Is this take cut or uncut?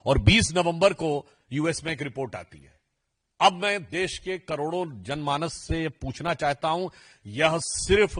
uncut